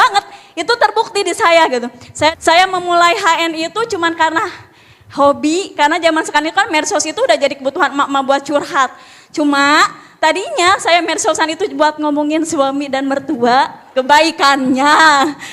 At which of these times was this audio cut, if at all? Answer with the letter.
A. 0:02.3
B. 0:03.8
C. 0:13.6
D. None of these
A